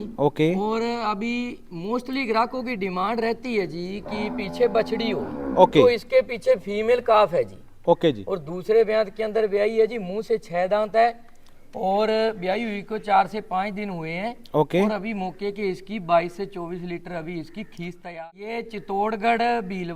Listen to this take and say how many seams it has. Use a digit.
1